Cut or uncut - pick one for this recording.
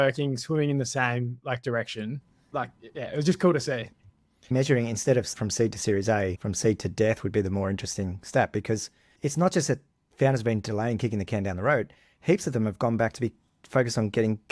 cut